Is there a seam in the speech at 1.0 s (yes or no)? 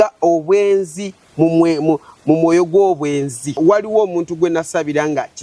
no